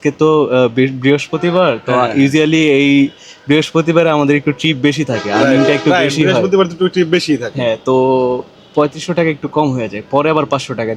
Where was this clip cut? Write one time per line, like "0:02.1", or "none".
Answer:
none